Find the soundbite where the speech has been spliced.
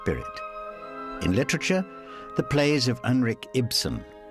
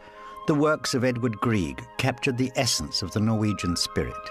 first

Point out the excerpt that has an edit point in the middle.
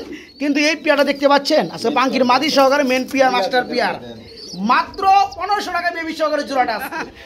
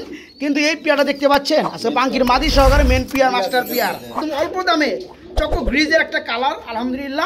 second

